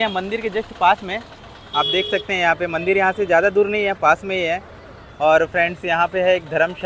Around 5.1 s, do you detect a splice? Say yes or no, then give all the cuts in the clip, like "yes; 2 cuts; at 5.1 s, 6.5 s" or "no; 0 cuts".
no; 0 cuts